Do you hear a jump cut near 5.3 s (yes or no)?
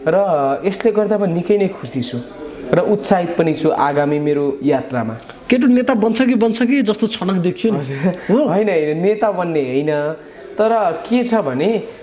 no